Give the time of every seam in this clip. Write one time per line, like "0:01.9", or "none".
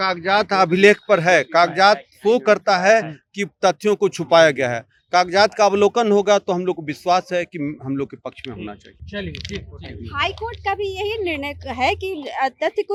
none